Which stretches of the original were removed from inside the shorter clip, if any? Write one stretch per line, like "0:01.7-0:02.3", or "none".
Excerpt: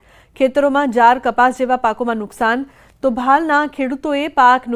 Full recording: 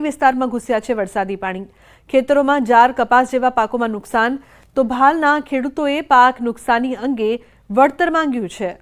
none